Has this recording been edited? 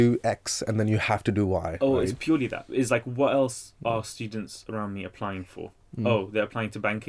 no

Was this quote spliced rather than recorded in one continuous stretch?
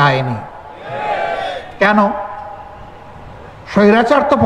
no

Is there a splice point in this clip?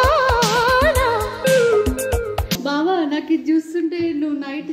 yes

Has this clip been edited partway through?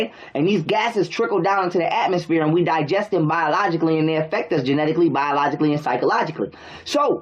yes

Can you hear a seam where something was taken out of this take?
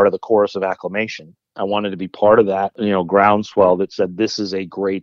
yes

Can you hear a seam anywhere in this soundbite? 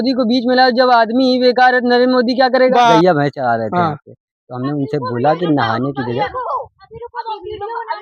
yes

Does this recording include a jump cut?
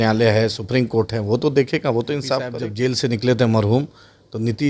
yes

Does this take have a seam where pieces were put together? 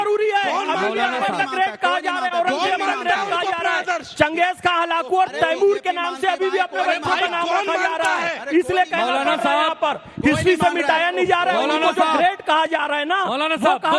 no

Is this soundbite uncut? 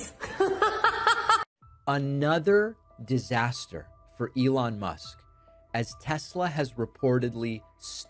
no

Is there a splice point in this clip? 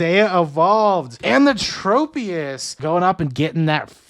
yes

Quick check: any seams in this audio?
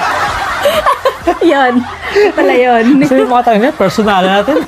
no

